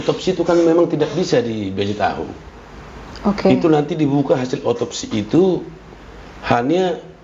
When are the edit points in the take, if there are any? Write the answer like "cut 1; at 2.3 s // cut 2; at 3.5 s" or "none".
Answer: none